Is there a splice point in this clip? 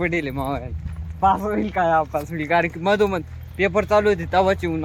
no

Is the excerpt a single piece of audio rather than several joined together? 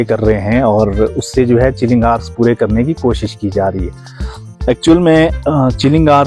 yes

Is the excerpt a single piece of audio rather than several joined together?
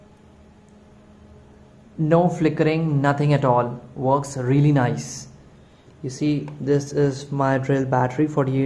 no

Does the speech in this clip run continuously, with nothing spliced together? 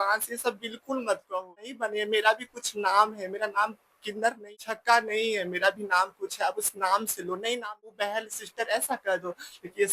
no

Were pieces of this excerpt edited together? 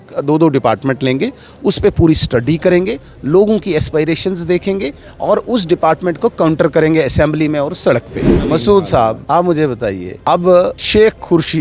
yes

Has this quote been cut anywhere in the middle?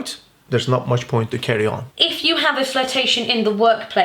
yes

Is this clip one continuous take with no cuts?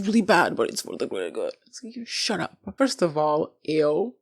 no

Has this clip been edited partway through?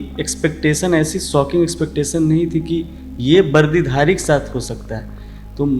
no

